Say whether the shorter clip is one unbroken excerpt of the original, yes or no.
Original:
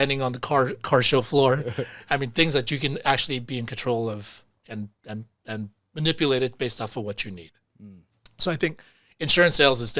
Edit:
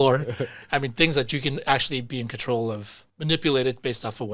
no